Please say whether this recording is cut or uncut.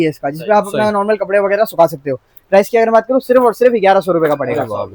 uncut